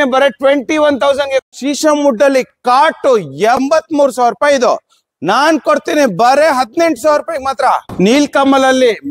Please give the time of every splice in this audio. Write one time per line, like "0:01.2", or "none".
0:01.4
0:03.6
0:07.9